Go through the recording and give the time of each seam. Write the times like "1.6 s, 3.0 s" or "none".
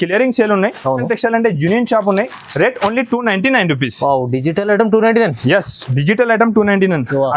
1.1 s